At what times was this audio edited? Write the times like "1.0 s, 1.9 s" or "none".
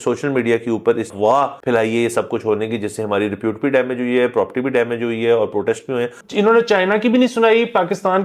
1.3 s, 6.2 s